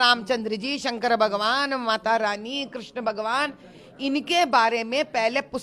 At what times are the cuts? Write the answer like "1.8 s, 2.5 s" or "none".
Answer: none

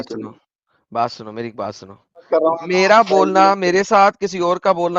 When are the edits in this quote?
2.3 s

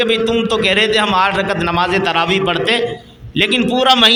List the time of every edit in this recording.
none

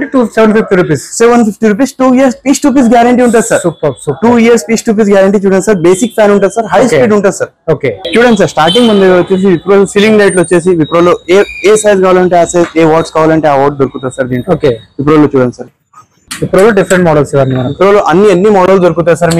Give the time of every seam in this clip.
none

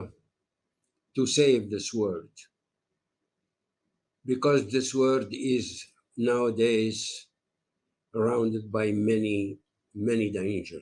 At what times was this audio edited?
none

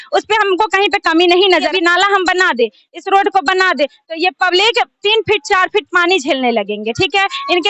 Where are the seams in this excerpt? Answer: 1.7 s

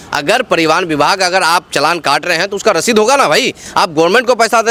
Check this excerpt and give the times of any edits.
none

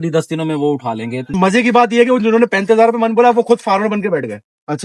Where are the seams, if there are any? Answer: 1.3 s

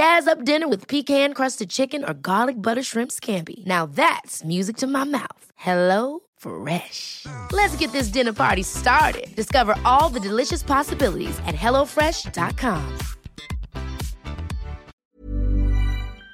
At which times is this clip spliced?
14.9 s

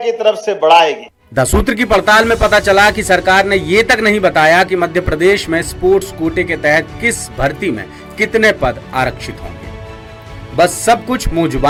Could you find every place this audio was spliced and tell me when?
none

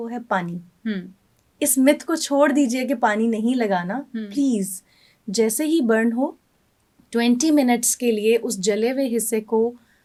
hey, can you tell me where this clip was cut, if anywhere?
none

